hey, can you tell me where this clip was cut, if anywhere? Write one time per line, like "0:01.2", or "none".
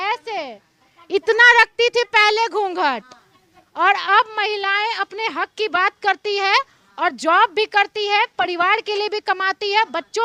none